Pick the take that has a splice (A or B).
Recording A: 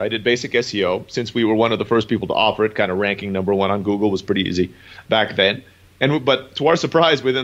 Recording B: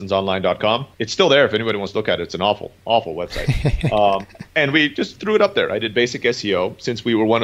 B